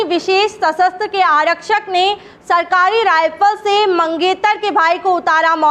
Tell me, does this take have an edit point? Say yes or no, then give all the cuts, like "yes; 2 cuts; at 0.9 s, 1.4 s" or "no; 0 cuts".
no; 0 cuts